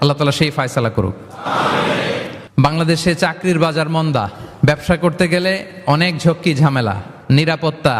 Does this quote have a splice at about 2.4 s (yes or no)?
yes